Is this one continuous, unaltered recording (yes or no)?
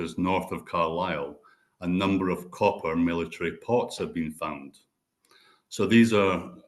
yes